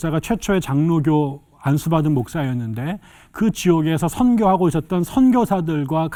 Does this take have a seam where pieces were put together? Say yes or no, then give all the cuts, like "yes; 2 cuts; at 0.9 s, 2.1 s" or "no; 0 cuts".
no; 0 cuts